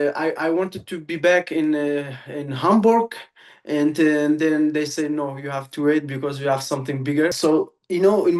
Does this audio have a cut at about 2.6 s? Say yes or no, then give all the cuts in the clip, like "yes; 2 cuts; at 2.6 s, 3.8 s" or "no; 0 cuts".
no; 1 cut; at 7.4 s